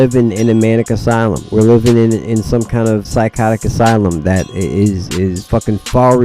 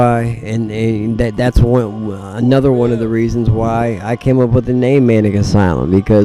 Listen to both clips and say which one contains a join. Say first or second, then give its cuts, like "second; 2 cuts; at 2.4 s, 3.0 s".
first; 4 cuts; at 1.4 s, 3.1 s, 4.5 s, 5.4 s